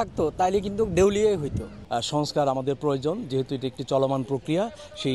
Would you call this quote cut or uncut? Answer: cut